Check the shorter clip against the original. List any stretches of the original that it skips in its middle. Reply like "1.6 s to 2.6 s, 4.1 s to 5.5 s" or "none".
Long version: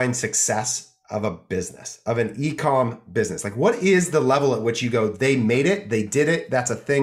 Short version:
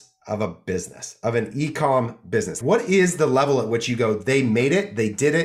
3.4 s to 3.5 s